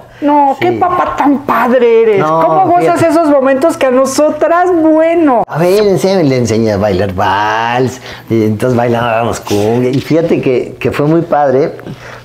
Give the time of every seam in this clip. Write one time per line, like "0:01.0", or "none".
0:05.5
0:09.9